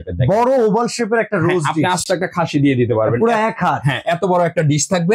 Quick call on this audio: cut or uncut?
uncut